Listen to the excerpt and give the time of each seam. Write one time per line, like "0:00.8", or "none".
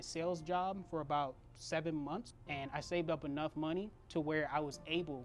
0:02.4
0:04.0